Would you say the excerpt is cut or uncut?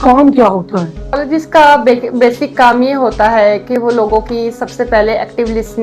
cut